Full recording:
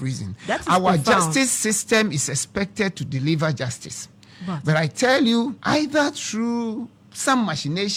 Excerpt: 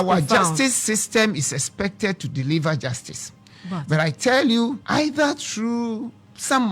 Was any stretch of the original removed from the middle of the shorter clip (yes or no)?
no